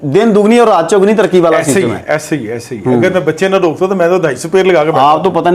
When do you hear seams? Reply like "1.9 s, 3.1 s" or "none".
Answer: none